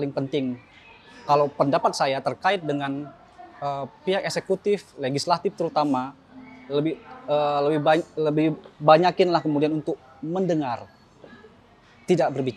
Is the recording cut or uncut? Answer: uncut